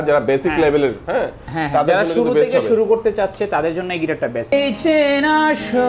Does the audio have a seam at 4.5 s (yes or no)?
yes